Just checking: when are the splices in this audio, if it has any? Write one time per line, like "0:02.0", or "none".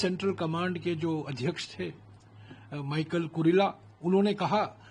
none